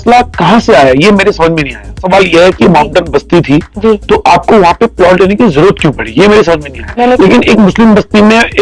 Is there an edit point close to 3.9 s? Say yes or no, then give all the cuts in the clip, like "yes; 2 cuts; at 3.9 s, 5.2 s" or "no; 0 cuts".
no; 2 cuts; at 2.0 s, 6.8 s